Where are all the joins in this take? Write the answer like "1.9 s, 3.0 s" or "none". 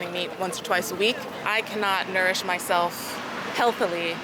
1.4 s